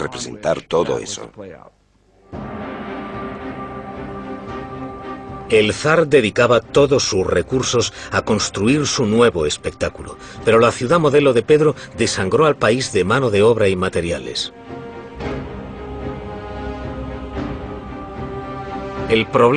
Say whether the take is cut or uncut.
uncut